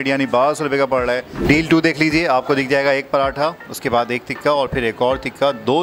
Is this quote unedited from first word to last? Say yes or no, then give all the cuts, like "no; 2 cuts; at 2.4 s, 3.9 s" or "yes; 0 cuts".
no; 1 cut; at 1.3 s